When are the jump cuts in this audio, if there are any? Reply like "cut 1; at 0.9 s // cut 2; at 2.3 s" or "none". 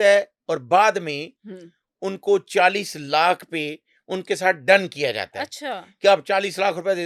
none